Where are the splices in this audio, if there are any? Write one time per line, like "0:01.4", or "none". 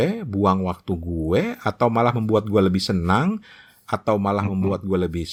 none